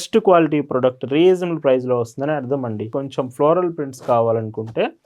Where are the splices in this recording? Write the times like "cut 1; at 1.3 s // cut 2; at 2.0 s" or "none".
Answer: cut 1; at 2.9 s

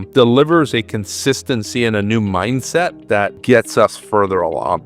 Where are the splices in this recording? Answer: none

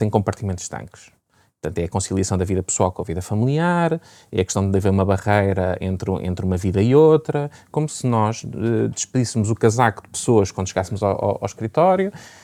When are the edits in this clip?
none

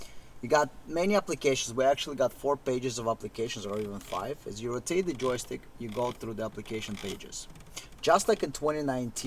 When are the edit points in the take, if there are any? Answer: none

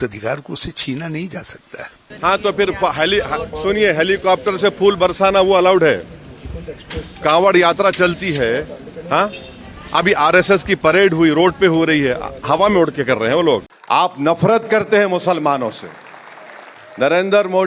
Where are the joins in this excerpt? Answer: cut 1; at 2.0 s // cut 2; at 13.7 s

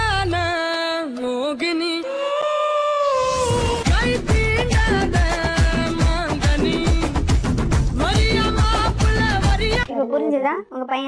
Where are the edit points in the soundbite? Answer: cut 1; at 9.9 s

